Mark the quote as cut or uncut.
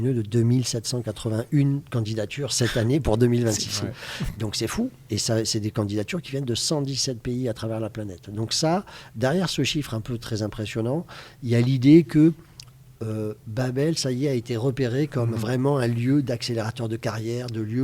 uncut